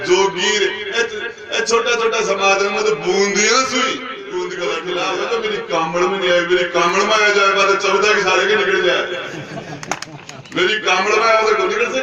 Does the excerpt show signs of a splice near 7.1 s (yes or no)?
no